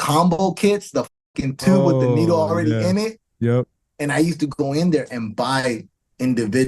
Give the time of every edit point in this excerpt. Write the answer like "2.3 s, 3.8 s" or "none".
none